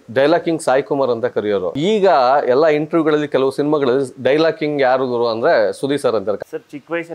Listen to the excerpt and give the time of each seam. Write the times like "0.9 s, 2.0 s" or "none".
1.7 s, 6.4 s